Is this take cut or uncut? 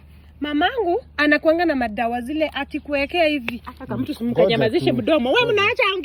uncut